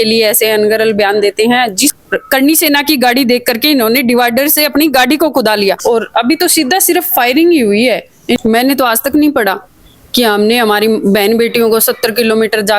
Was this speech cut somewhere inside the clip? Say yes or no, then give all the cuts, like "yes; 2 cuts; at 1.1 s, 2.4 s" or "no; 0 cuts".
yes; 3 cuts; at 1.9 s, 5.8 s, 8.4 s